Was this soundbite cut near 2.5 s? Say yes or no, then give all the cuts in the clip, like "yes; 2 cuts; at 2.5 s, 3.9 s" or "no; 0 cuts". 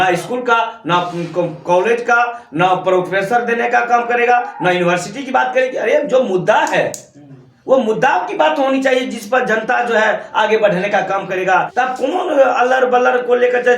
no; 1 cut; at 11.7 s